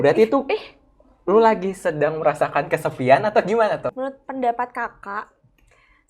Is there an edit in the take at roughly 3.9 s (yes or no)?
yes